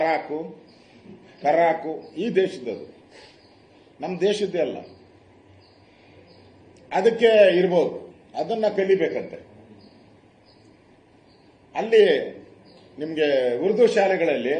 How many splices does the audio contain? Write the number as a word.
zero